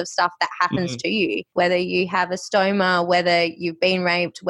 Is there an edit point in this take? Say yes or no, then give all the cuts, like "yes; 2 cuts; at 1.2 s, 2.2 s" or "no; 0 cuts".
yes; 1 cut; at 1.5 s